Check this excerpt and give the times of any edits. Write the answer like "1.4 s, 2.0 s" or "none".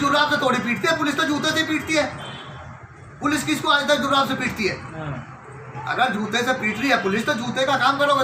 none